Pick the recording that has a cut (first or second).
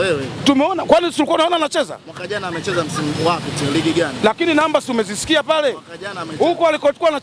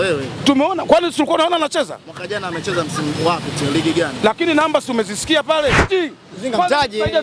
second